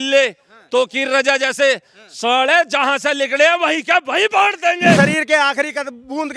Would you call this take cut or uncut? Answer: cut